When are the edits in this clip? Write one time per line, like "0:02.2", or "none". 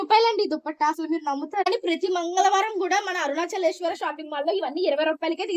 0:01.7